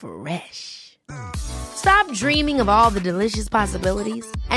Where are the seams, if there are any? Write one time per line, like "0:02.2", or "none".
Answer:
none